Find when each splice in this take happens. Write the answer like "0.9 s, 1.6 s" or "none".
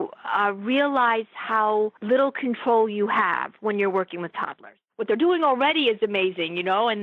2.0 s, 4.9 s